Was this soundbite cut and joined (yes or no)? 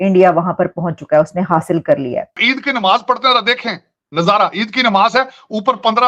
yes